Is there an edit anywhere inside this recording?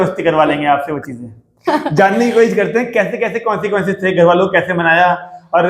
no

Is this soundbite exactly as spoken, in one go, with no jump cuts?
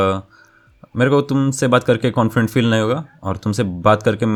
yes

